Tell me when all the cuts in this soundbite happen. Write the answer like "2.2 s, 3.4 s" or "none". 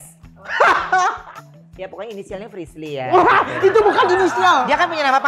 1.2 s